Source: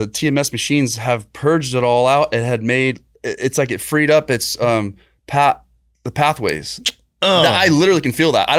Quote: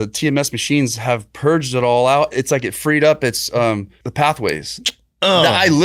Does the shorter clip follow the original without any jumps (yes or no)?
no